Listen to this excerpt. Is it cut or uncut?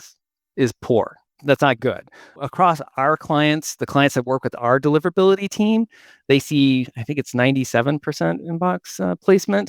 cut